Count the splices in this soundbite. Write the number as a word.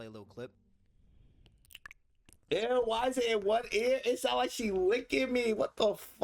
one